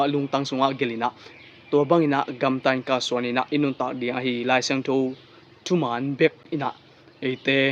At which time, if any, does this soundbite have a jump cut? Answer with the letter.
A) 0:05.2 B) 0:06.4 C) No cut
B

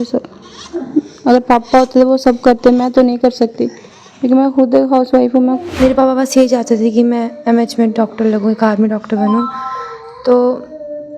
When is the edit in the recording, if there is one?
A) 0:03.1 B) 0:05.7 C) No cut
B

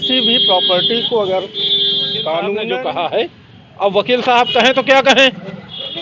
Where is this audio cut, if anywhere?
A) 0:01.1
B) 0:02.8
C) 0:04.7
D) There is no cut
B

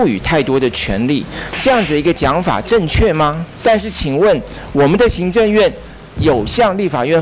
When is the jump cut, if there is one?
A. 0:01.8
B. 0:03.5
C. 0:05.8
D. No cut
B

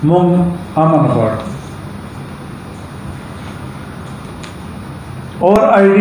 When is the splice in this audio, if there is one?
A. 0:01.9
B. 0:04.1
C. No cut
C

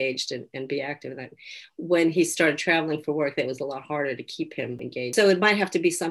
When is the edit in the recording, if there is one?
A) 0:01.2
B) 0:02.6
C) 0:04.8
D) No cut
C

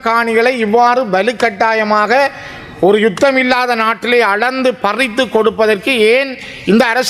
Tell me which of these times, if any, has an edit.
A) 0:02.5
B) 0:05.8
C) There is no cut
C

